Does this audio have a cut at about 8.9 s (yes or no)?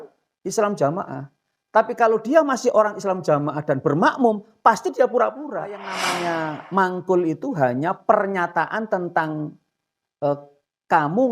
no